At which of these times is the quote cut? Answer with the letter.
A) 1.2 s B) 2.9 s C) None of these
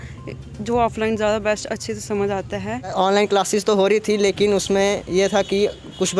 B